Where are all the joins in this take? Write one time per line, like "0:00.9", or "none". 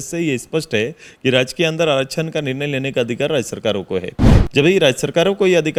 none